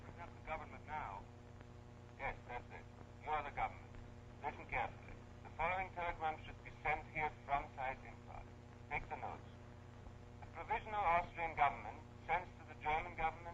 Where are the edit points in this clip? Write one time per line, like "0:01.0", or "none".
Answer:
0:06.7